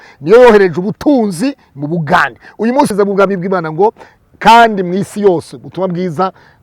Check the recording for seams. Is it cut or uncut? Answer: cut